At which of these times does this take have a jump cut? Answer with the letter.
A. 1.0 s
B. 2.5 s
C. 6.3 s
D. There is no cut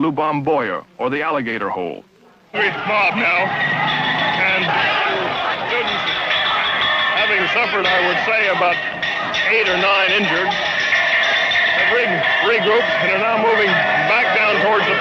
B